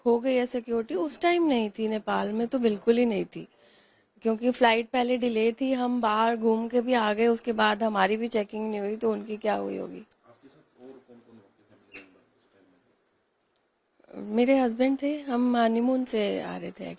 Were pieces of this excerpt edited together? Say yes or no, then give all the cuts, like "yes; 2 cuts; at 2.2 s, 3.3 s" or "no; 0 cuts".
no; 0 cuts